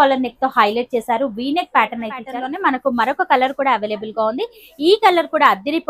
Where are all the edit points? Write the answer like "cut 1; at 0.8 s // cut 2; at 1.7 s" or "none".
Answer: cut 1; at 2.3 s